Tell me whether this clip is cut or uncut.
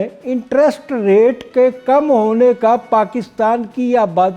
uncut